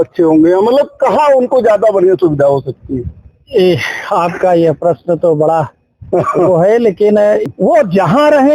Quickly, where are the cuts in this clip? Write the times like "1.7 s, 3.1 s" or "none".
7.5 s